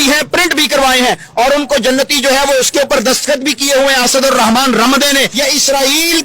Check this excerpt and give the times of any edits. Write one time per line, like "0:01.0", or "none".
0:05.3